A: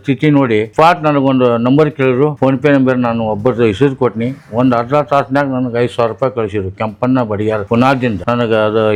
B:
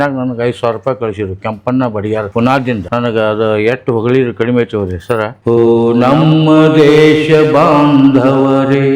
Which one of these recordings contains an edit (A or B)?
B